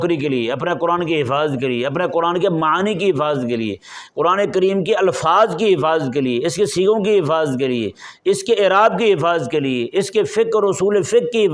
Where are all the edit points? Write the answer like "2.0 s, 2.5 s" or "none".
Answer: none